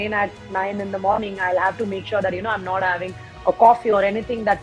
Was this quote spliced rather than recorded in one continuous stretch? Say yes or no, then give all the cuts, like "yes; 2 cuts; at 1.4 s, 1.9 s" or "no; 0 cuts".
no; 0 cuts